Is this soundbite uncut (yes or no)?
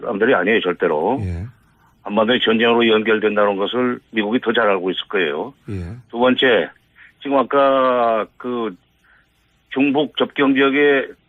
no